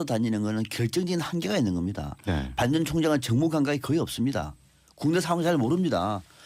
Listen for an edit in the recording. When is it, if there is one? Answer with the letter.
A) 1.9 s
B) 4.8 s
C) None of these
C